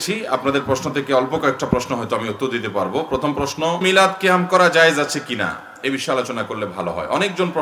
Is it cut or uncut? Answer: cut